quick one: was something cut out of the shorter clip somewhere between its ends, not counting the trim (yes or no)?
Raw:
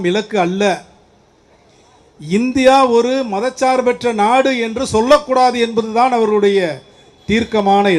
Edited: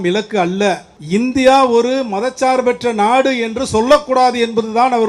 yes